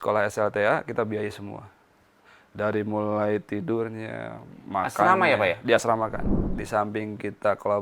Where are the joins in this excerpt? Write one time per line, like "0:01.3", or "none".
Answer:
0:06.3